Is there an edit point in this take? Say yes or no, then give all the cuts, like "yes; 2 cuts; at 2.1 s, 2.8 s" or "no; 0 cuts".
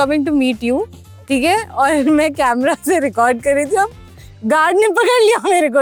no; 0 cuts